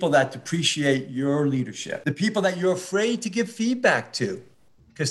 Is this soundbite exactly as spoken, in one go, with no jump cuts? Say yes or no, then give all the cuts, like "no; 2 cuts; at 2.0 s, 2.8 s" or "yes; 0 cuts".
no; 1 cut; at 1.8 s